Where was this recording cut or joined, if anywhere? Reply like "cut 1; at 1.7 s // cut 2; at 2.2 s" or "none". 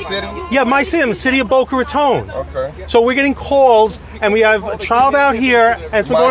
none